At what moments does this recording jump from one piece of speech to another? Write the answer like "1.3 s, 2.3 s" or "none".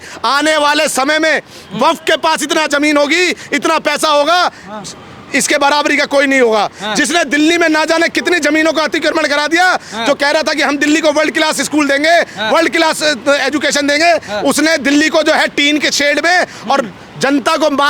none